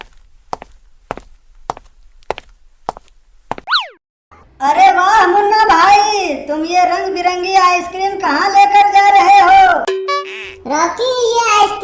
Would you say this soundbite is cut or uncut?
uncut